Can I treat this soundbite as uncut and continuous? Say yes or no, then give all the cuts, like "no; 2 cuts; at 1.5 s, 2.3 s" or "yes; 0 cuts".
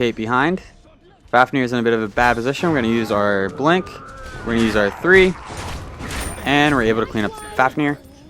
no; 1 cut; at 2.1 s